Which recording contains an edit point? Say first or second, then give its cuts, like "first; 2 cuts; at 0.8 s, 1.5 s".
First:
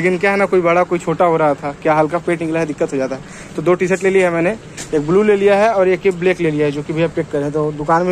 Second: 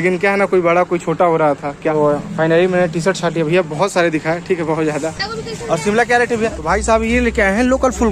second; 3 cuts; at 1.8 s, 5.3 s, 6.6 s